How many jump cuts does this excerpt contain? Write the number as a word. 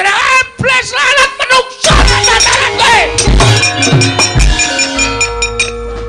one